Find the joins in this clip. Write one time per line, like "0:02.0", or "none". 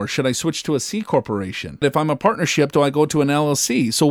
0:01.8